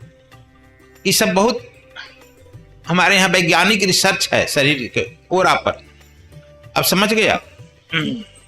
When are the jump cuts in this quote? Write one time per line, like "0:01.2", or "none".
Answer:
none